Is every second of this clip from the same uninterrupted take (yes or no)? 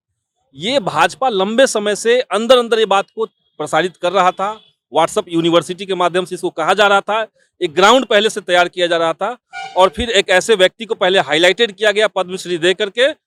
yes